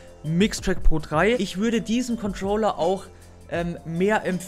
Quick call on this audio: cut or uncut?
cut